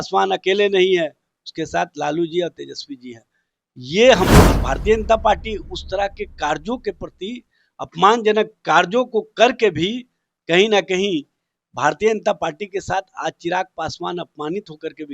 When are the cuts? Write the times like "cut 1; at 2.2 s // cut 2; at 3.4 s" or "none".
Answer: cut 1; at 4.4 s